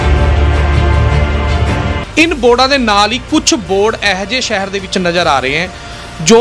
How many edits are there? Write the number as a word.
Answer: one